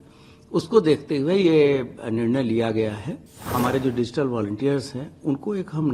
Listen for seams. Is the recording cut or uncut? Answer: cut